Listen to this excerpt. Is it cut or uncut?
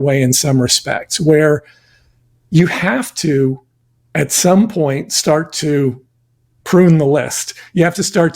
uncut